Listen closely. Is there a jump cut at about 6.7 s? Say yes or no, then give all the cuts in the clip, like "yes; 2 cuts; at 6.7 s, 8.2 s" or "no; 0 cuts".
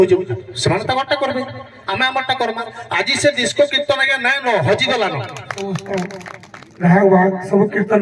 no; 1 cut; at 5.5 s